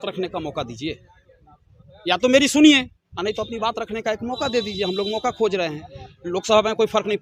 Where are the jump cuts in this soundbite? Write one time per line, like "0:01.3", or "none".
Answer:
none